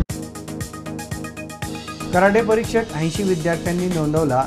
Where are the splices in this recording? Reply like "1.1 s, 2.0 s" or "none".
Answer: 2.1 s